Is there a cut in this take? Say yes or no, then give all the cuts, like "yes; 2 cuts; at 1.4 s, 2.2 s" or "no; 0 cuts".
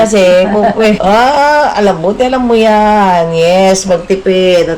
yes; 1 cut; at 1.0 s